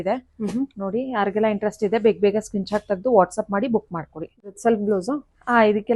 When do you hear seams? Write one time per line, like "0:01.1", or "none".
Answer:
0:04.4